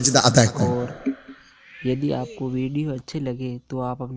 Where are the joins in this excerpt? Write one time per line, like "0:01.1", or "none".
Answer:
0:01.8